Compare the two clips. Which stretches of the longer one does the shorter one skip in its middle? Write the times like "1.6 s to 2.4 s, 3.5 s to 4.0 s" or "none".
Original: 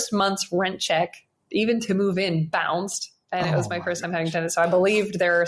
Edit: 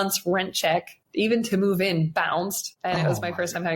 1.2 s to 1.3 s, 3.0 s to 3.1 s